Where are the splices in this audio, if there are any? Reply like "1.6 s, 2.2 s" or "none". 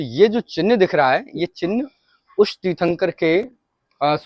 none